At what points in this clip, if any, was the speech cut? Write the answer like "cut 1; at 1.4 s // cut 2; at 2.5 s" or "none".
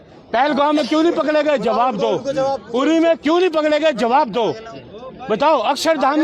none